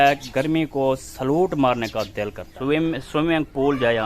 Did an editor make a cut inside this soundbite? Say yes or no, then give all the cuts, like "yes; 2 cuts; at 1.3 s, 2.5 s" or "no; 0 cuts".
yes; 1 cut; at 2.5 s